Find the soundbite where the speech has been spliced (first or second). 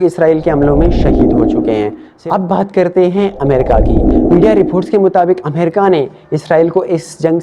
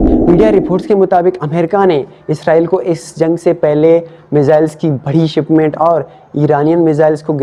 first